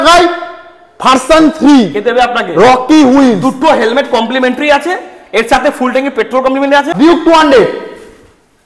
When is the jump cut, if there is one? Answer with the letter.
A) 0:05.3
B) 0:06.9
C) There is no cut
B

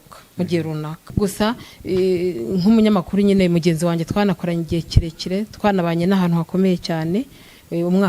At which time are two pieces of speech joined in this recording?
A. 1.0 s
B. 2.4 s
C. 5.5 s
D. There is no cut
A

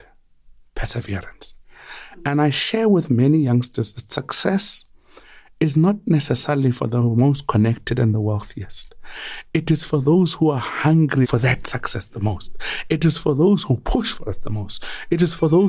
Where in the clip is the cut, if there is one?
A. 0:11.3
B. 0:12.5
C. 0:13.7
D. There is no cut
A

